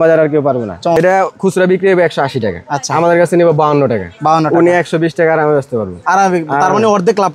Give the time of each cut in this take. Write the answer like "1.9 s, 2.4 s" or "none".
1.0 s